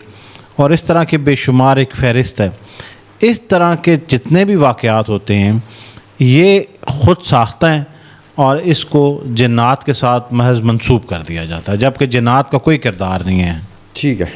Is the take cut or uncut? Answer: uncut